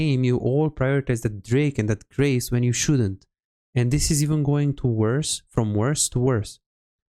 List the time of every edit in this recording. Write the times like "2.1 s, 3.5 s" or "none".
none